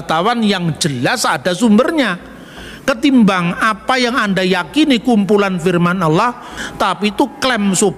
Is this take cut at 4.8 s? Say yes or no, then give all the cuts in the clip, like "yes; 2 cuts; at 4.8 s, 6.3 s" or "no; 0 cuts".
no; 1 cut; at 6.6 s